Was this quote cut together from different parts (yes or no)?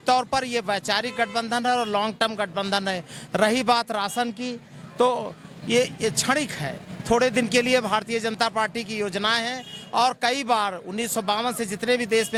no